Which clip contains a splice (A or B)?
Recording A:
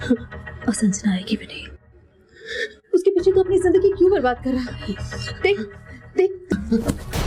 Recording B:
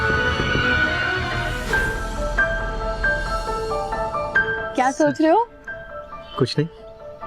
B